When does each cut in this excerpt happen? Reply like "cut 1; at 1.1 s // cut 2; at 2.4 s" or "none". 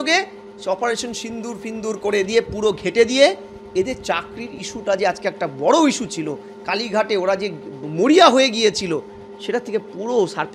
none

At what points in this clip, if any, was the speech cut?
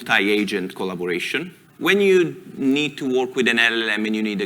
cut 1; at 1.7 s

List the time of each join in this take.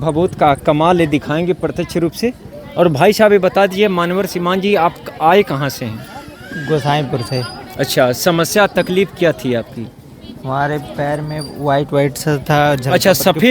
none

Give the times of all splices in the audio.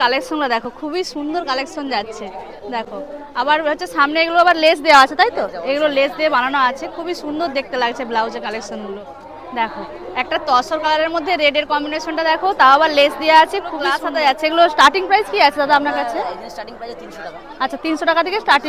none

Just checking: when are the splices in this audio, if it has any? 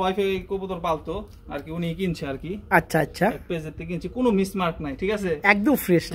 none

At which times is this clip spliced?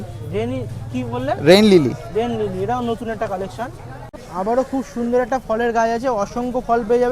cut 1; at 4.1 s

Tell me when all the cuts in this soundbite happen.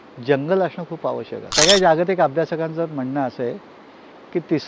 cut 1; at 1.4 s

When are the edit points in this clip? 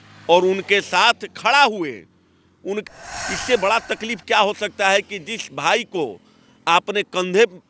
cut 1; at 2.8 s

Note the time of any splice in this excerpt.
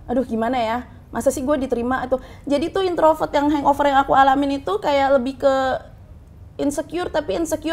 none

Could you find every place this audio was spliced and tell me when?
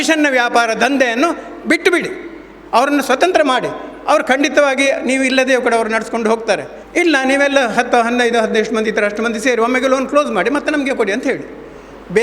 cut 1; at 6.8 s

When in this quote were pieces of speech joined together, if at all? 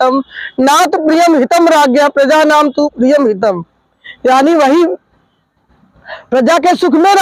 none

